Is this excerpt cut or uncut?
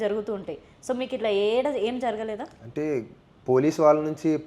uncut